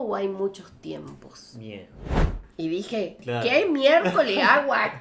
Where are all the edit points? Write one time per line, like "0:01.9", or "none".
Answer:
0:02.4